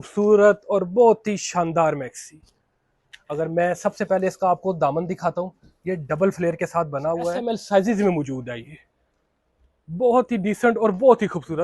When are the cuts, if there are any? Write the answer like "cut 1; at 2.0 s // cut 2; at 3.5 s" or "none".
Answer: cut 1; at 7.4 s